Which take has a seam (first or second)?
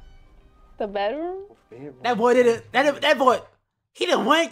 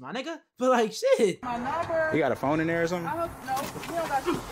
second